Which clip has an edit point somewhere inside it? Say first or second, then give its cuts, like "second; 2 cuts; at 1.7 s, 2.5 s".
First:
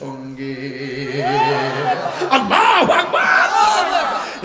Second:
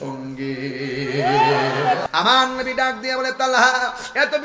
second; 1 cut; at 2.0 s